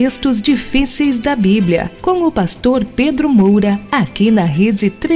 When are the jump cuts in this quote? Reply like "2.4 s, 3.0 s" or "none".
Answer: 3.8 s